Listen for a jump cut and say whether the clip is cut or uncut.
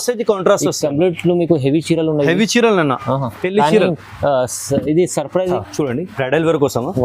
cut